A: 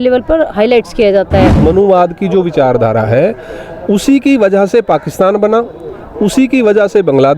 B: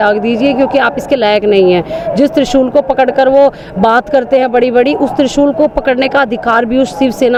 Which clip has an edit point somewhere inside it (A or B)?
A